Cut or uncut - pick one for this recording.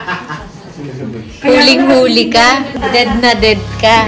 cut